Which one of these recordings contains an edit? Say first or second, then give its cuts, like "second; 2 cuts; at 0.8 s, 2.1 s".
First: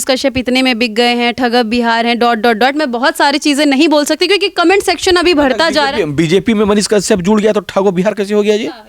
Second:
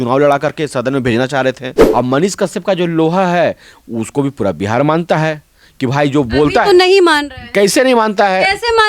second; 1 cut; at 1.7 s